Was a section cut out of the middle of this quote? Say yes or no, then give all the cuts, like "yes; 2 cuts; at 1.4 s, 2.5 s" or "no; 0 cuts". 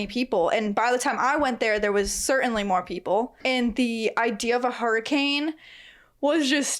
yes; 1 cut; at 3.4 s